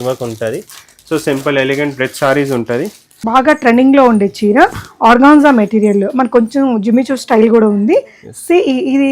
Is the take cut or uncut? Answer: cut